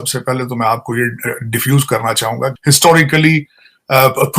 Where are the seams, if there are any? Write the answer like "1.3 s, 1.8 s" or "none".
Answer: 2.5 s